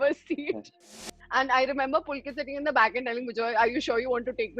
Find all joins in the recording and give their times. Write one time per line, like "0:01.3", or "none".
0:01.1